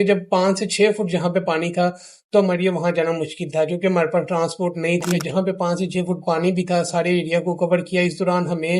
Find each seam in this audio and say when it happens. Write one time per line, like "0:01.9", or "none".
0:05.2